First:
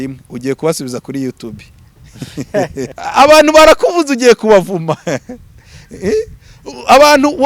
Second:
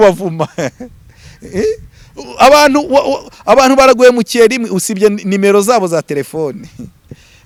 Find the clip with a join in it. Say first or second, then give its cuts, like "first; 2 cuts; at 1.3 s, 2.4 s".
first; 1 cut; at 2.9 s